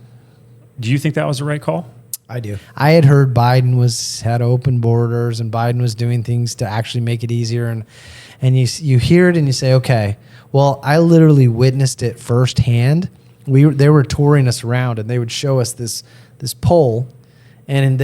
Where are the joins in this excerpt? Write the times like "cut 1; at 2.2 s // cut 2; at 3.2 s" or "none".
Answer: cut 1; at 2.6 s